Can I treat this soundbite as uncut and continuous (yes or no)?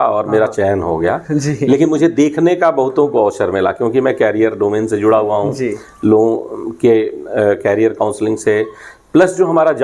yes